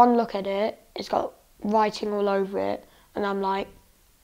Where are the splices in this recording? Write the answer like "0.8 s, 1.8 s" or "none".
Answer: none